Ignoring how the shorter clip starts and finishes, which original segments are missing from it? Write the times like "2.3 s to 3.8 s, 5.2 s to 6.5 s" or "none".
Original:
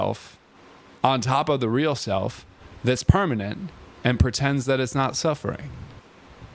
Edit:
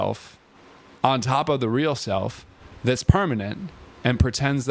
none